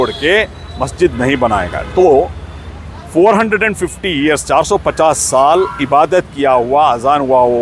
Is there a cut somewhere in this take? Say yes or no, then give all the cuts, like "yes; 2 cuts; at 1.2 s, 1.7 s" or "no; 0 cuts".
no; 0 cuts